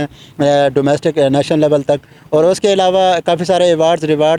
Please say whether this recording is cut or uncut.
uncut